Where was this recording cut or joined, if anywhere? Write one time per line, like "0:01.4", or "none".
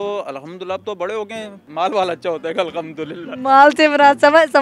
0:01.6